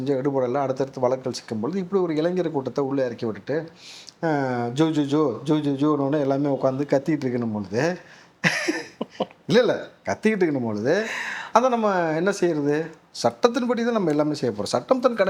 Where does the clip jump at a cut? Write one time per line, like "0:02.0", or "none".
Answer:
none